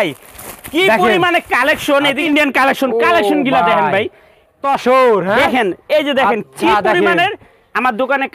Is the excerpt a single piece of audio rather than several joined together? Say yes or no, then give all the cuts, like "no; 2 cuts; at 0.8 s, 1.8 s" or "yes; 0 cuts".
no; 2 cuts; at 2.2 s, 4.6 s